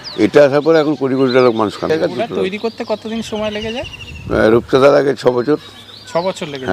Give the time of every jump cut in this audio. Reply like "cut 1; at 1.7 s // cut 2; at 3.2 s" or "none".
cut 1; at 1.9 s